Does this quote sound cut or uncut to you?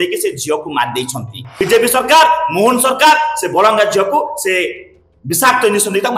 cut